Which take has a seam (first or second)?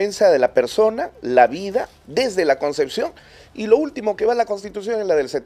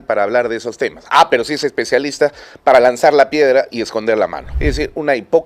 second